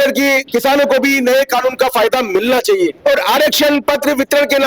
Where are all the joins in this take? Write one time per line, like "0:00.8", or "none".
0:03.0